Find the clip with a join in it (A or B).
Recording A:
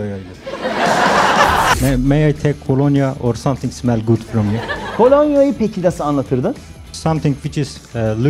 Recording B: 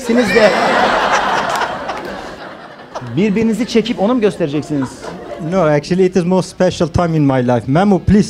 A